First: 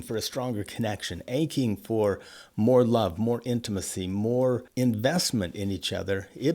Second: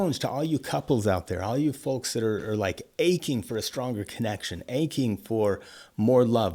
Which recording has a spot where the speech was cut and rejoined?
first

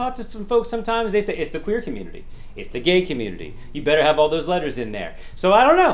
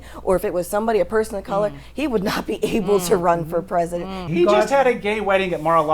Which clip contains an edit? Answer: second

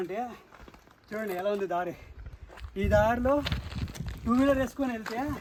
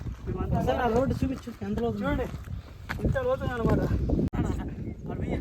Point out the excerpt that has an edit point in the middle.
second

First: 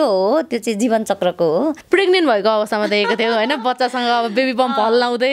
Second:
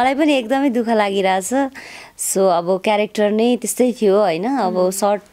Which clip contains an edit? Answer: first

